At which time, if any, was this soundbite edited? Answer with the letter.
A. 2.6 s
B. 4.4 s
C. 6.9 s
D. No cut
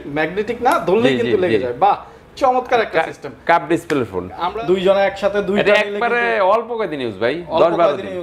B